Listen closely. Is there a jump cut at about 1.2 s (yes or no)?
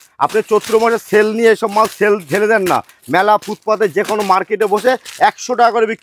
no